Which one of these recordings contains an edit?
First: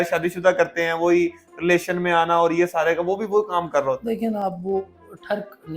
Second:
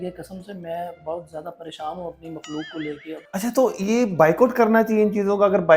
second; 1 cut; at 3.2 s

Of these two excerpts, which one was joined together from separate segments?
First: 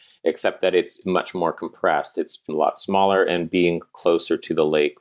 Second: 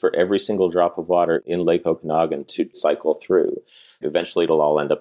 second; 3 cuts; at 1.4 s, 2.8 s, 4.0 s

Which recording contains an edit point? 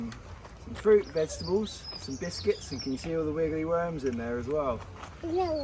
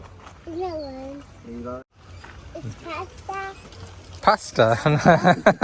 second; 1 cut; at 1.9 s

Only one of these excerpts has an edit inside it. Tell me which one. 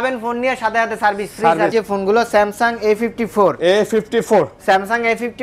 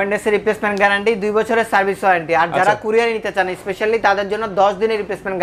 first; 1 cut; at 1.7 s

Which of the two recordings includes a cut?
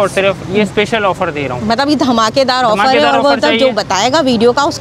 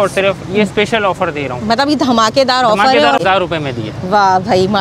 second; 1 cut; at 3.2 s

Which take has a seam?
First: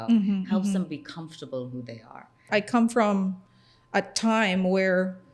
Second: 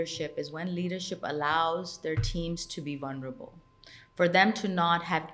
first; 1 cut; at 2.5 s

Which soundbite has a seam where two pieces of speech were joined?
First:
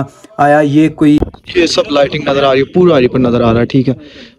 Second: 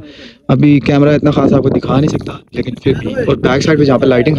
first; 1 cut; at 1.2 s

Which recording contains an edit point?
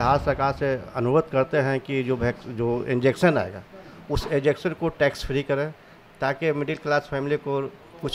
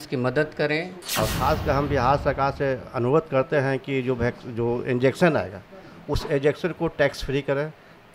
second; 1 cut; at 1.0 s

